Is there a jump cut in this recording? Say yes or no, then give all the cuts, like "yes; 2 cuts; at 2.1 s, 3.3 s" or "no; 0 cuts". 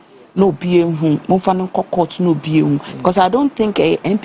no; 0 cuts